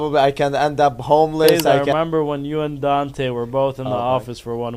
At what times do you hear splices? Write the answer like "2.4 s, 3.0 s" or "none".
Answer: 1.8 s